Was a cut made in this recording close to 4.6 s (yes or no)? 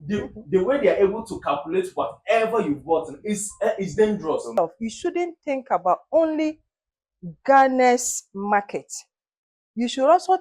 yes